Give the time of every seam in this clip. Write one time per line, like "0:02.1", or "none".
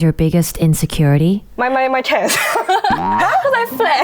0:01.5